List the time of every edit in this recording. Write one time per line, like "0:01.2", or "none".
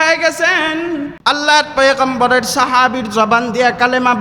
0:01.1